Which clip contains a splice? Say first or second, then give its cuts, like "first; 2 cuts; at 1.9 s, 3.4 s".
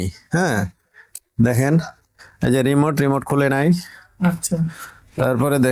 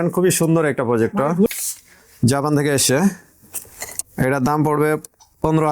second; 1 cut; at 1.5 s